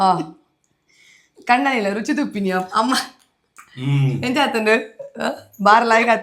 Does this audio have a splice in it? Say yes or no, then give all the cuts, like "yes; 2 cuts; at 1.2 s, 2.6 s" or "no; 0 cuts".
no; 0 cuts